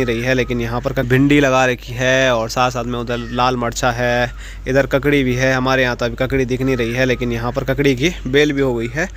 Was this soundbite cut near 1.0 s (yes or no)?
no